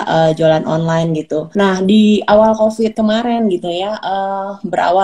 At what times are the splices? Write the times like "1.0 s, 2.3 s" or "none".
1.5 s, 2.9 s